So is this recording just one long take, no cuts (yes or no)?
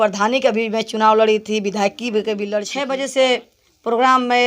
no